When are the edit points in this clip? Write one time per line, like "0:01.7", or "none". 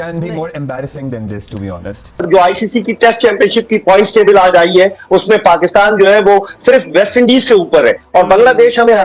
0:02.1